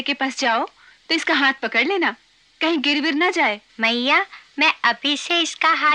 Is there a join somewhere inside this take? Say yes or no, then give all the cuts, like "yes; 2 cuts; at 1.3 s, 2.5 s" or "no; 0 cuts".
yes; 1 cut; at 3.7 s